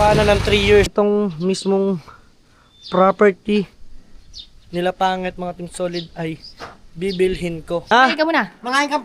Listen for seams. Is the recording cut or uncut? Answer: cut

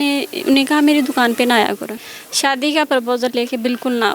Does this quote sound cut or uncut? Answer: cut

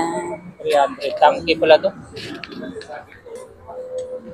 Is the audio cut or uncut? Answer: cut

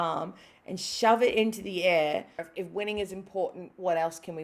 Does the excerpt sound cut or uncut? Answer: cut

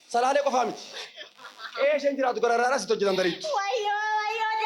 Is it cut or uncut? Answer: uncut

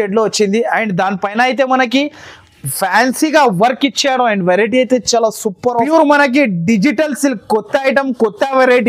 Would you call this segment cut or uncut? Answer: cut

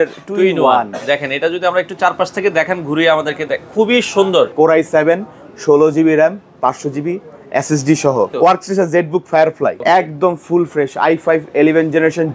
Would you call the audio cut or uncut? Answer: cut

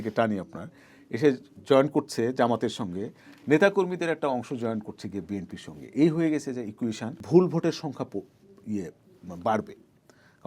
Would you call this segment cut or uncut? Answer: cut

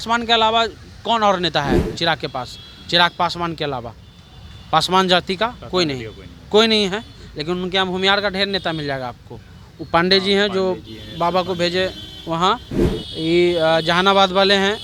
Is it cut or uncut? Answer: uncut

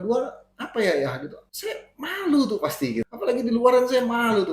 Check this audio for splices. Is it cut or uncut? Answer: cut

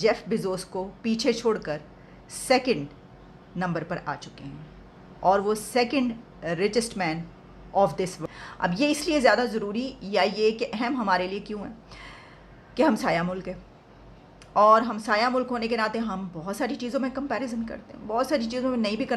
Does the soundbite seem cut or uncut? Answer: cut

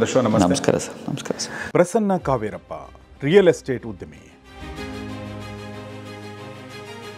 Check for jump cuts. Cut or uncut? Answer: uncut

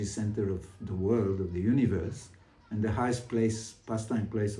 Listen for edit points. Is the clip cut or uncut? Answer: uncut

